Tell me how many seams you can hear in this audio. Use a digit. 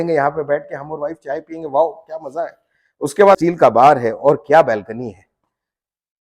1